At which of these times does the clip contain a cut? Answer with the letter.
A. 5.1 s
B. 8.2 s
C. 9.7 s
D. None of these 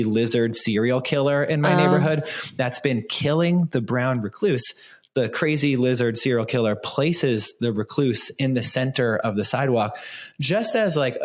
D